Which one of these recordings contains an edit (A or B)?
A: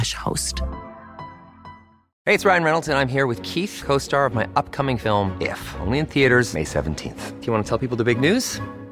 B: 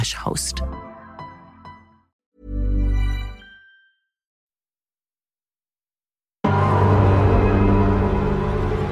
A